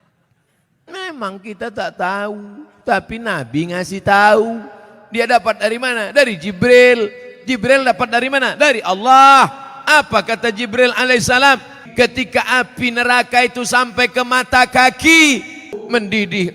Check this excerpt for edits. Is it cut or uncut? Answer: cut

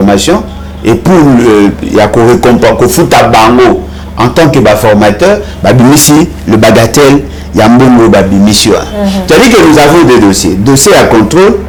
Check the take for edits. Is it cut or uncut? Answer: uncut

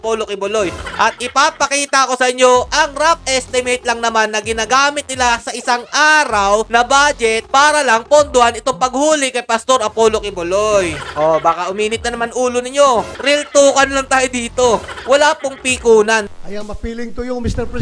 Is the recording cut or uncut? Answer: cut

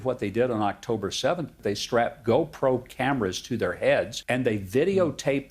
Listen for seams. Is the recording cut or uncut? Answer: cut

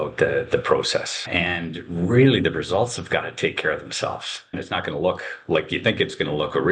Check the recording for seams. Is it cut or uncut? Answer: cut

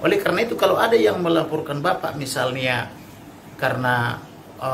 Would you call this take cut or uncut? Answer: uncut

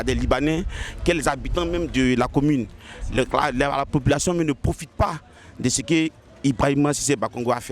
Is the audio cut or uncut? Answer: uncut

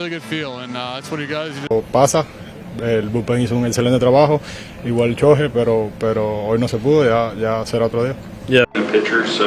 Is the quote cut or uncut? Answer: cut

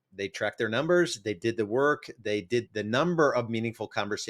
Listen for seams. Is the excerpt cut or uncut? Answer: cut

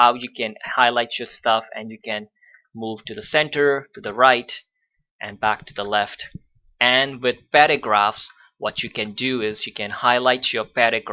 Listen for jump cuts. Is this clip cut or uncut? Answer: cut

